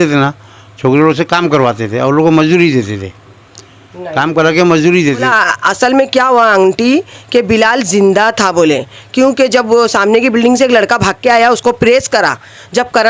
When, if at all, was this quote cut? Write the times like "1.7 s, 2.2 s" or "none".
5.3 s